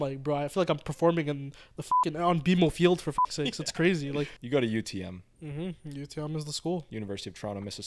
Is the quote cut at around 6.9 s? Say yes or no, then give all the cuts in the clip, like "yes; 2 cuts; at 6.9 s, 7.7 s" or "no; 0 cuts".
yes; 2 cuts; at 4.4 s, 6.9 s